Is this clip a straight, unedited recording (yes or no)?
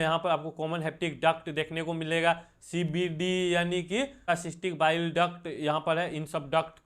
no